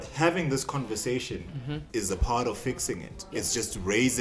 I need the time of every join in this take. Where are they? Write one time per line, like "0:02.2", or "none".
0:01.8

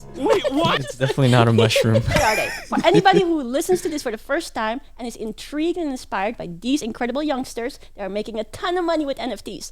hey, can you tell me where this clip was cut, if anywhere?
0:02.2

